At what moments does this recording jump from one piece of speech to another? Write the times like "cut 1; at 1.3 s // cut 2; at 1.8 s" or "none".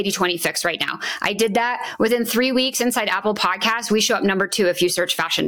none